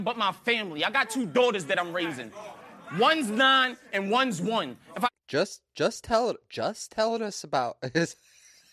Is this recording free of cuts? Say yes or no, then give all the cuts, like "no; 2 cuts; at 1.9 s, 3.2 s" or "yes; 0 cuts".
no; 2 cuts; at 1.3 s, 5.1 s